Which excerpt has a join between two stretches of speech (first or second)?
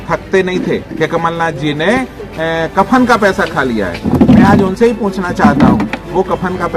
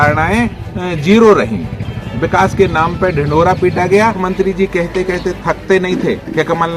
second